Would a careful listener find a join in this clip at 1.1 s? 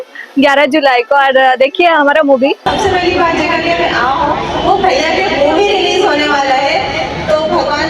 no; 1 cut; at 2.8 s

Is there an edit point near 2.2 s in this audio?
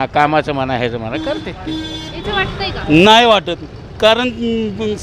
yes; 1 cut; at 2.2 s

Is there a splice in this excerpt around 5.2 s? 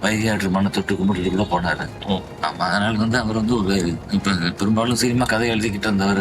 no; 1 cut; at 4.0 s

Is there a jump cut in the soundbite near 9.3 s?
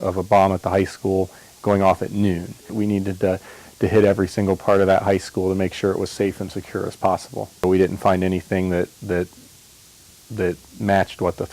no; 2 cuts; at 2.7 s, 7.6 s

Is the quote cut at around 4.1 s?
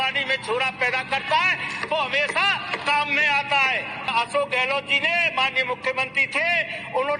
yes; 1 cut; at 4.1 s

